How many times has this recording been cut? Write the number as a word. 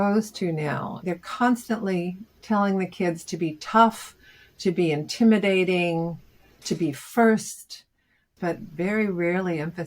two